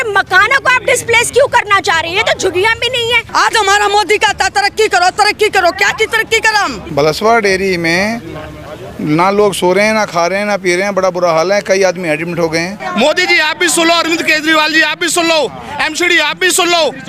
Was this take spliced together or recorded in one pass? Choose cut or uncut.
cut